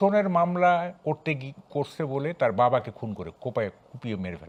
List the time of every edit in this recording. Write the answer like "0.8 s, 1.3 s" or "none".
none